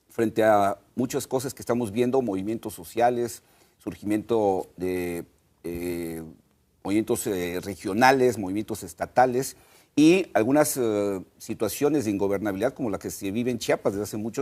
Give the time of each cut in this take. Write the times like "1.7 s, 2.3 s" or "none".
6.4 s